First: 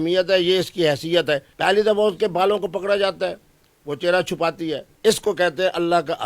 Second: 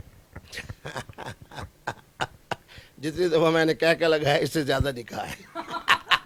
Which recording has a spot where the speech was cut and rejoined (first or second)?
first